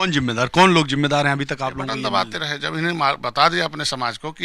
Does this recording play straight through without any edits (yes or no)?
no